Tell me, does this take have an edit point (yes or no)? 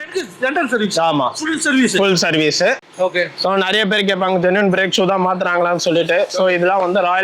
yes